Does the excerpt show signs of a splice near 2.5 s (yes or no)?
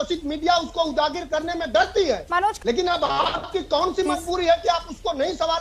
yes